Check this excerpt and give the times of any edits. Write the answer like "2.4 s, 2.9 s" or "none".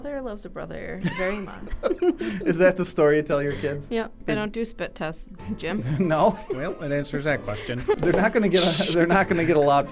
1.6 s, 4.2 s, 8.0 s

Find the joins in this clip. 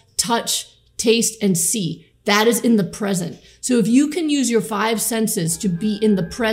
none

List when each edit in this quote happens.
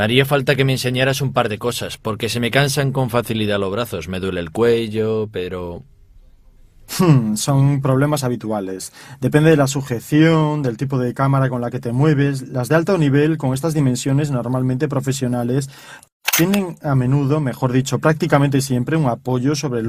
10.0 s

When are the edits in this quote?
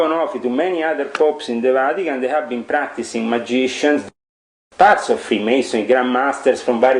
4.0 s

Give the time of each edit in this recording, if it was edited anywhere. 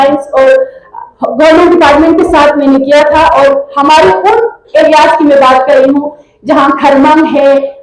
none

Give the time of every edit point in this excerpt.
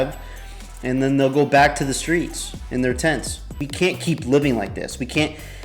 3.6 s

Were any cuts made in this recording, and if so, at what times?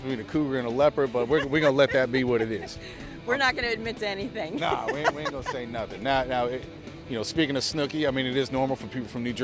none

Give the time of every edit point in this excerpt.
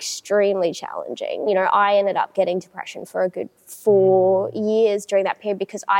1.5 s

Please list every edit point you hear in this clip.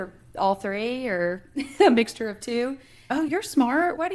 3.1 s

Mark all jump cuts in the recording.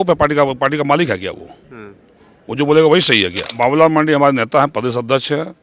3.5 s

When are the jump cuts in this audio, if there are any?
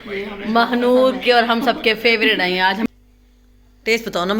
2.9 s

